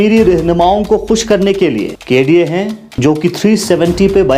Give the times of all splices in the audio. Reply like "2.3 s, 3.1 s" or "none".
2.0 s, 3.0 s